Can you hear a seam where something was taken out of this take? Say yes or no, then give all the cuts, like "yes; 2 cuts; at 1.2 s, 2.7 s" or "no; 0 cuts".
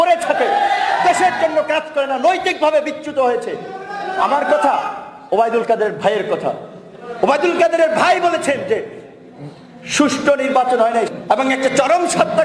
yes; 1 cut; at 11.1 s